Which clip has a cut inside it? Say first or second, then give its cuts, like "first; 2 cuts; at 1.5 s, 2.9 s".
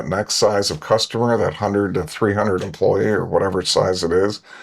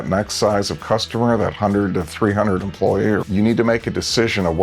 second; 1 cut; at 3.3 s